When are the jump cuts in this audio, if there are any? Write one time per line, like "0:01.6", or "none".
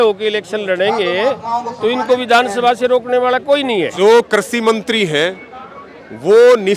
0:03.9